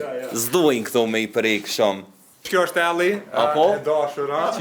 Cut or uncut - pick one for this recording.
cut